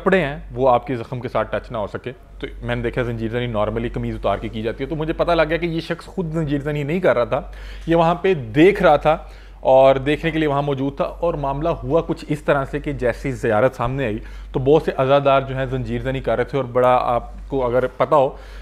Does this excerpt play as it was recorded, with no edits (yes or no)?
yes